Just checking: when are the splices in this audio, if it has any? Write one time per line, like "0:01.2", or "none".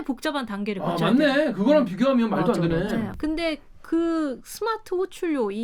0:03.1